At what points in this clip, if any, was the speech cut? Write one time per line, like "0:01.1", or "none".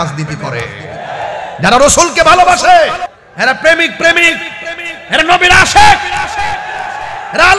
0:03.1